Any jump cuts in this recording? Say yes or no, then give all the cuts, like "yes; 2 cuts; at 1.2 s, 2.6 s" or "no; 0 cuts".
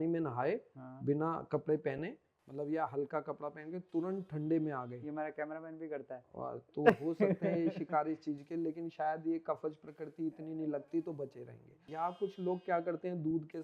yes; 1 cut; at 11.8 s